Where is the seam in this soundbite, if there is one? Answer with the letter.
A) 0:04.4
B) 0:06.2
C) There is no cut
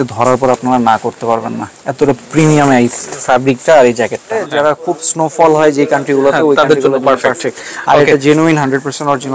A